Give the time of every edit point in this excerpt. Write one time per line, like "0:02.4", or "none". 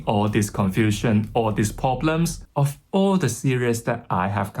0:02.4